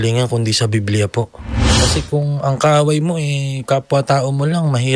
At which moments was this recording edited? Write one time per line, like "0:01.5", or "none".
0:01.8